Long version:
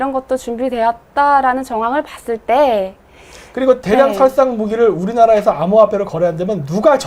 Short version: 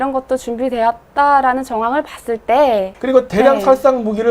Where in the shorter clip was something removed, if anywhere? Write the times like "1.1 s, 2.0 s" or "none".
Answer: 2.9 s